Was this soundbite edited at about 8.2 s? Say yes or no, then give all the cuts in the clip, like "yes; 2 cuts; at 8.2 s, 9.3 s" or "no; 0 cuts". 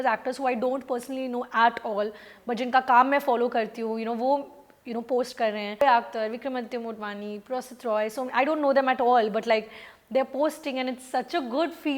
no; 1 cut; at 5.8 s